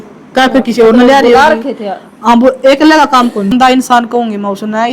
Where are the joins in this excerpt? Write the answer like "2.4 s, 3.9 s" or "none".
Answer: 3.5 s